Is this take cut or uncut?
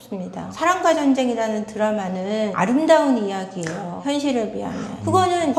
uncut